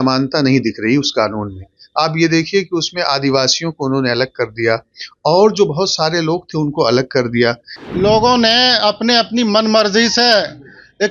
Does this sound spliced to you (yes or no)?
yes